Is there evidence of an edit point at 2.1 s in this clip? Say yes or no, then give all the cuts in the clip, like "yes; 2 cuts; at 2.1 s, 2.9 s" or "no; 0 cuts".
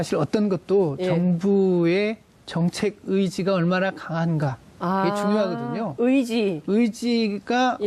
yes; 1 cut; at 2.1 s